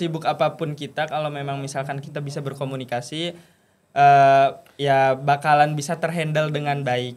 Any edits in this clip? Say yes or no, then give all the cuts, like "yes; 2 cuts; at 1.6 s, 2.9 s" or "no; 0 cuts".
no; 0 cuts